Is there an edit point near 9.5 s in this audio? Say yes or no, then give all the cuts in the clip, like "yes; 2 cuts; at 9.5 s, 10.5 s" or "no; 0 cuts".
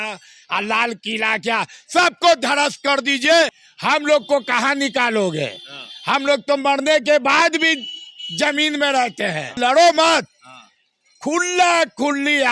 yes; 2 cuts; at 3.6 s, 9.5 s